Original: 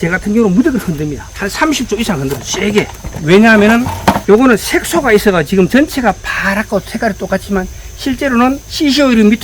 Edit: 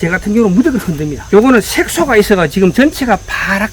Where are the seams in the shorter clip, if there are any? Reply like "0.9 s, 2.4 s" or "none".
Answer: 1.2 s